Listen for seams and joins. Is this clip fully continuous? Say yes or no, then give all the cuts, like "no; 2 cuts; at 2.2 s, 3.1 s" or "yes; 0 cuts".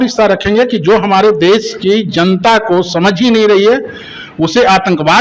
yes; 0 cuts